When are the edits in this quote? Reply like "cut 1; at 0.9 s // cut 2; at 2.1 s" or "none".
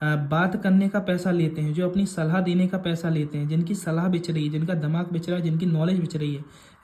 none

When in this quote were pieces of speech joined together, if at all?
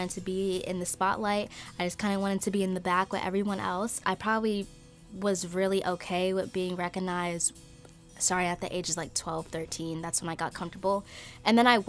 none

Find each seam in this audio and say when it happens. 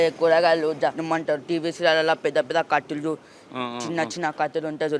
cut 1; at 1.0 s

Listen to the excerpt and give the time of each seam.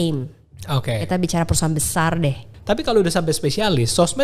cut 1; at 2.5 s

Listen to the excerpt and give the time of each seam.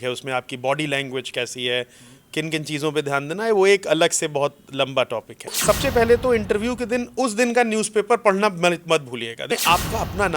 cut 1; at 5.6 s // cut 2; at 9.4 s

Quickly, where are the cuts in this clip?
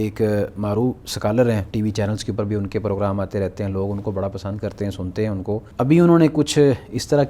cut 1; at 1.7 s // cut 2; at 5.7 s

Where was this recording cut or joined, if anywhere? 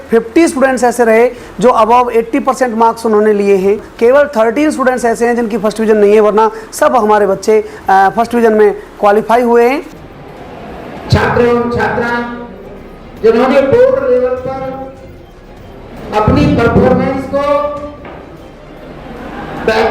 cut 1; at 3.9 s // cut 2; at 9.9 s

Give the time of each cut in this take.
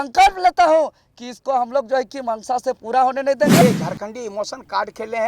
cut 1; at 3.6 s

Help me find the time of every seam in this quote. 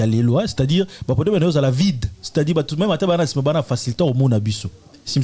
none

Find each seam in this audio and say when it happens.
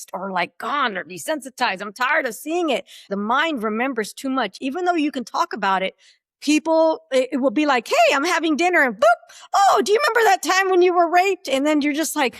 cut 1; at 3.1 s

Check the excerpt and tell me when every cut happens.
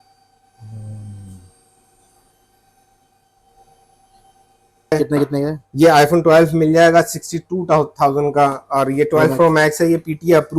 cut 1; at 4.9 s

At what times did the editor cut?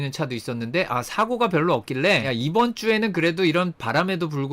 none

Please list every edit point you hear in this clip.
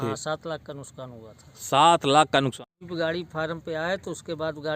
cut 1; at 2.6 s

